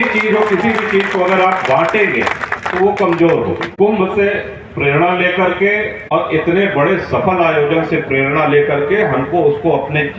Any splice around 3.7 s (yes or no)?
yes